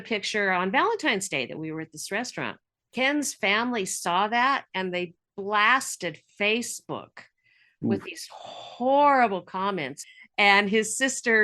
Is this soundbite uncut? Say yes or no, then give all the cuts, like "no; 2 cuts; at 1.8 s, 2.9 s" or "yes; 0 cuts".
no; 2 cuts; at 2.7 s, 10.0 s